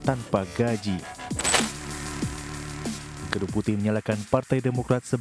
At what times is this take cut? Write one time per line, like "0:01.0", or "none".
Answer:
0:01.6

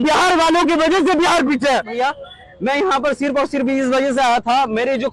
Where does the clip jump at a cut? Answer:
0:01.9

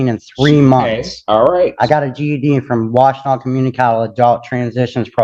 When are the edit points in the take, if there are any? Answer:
none

